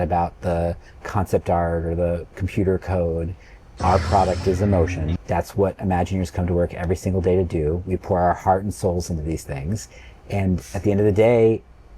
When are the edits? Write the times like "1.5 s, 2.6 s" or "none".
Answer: 5.1 s